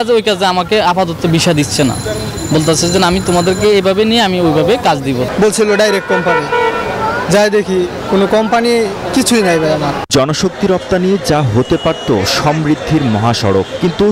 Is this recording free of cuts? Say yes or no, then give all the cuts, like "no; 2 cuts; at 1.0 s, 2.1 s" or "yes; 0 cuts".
no; 1 cut; at 10.0 s